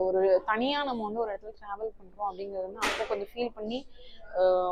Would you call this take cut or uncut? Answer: uncut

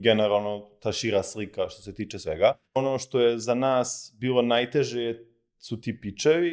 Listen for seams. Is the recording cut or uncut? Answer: cut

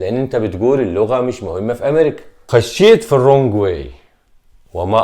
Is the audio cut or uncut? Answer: cut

